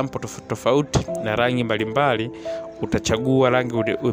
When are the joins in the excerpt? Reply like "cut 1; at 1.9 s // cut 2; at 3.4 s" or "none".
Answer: none